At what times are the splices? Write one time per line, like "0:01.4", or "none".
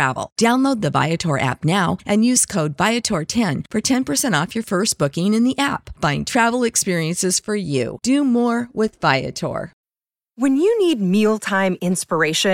0:09.7

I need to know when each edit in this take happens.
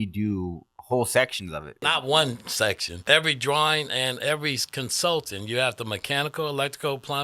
0:01.7
0:02.9

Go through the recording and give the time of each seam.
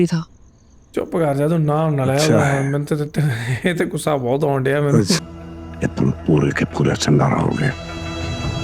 0:05.2

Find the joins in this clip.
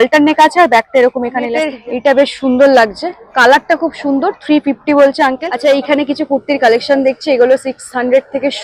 0:01.7
0:05.5

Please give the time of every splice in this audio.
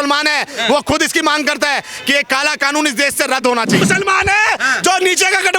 0:03.8

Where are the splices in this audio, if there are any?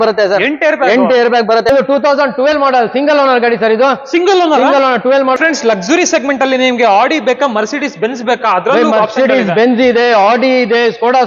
0:01.7
0:05.4

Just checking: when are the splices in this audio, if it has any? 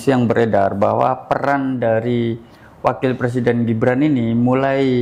none

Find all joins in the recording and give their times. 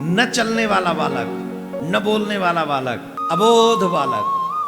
0:01.8
0:03.1

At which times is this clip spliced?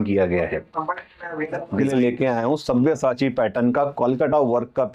0:01.7

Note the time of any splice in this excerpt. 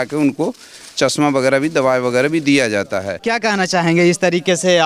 0:03.2

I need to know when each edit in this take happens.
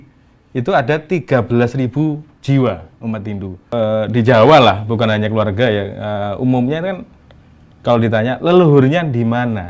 0:03.7

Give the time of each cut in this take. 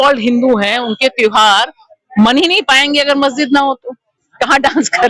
none

